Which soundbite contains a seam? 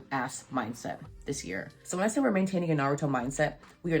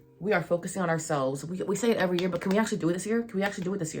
first; 1 cut; at 1.7 s

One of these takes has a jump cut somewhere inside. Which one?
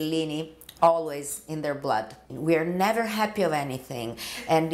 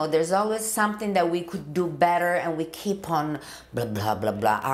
first; 1 cut; at 2.2 s

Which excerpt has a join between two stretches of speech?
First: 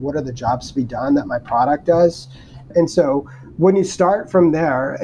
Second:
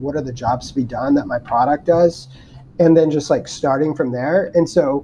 first; 1 cut; at 2.7 s

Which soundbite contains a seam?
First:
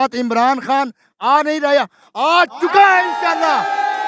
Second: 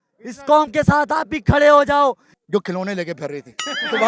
second; 1 cut; at 2.3 s

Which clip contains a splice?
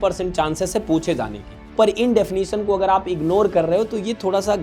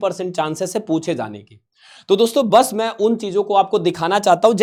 first; 1 cut; at 1.7 s

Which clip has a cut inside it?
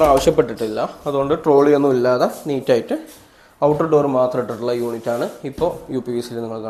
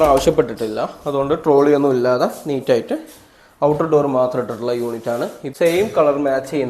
second; 1 cut; at 5.4 s

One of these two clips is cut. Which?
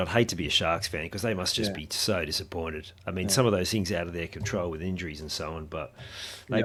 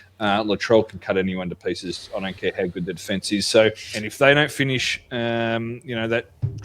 second; 1 cut; at 3.9 s

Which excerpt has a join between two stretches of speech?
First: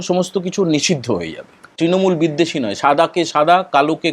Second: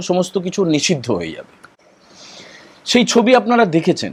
first; 1 cut; at 1.7 s

